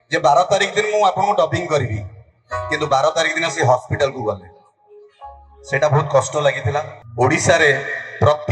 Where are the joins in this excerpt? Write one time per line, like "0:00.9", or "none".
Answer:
0:07.0